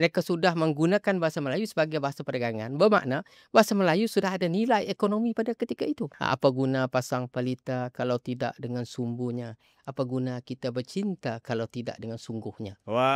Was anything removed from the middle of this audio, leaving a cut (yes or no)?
yes